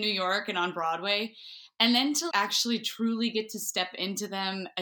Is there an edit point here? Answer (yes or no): no